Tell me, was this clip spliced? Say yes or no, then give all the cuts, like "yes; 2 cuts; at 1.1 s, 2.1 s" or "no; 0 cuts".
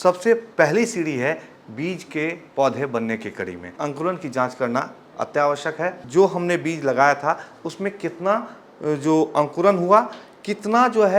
yes; 2 cuts; at 3.7 s, 6.0 s